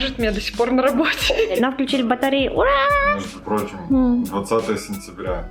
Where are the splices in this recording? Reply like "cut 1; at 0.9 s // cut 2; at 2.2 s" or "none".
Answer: cut 1; at 1.5 s